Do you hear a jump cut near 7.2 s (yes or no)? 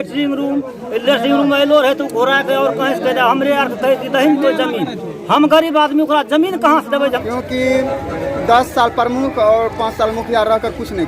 yes